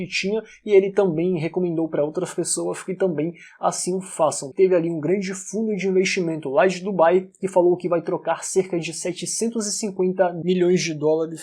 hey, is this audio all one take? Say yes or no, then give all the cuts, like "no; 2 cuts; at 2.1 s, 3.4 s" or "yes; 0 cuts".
no; 1 cut; at 4.4 s